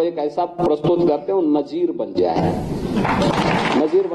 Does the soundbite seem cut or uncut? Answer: uncut